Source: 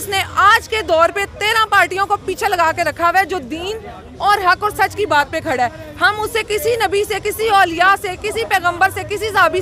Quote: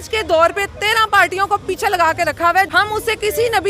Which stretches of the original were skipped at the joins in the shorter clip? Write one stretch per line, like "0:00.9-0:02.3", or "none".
0:03.3-0:06.0